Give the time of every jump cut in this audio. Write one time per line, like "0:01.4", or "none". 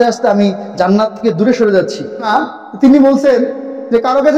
0:02.3